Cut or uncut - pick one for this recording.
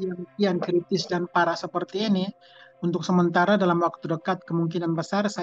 uncut